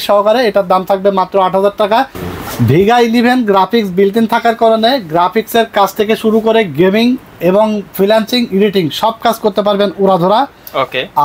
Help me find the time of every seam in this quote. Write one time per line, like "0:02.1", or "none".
none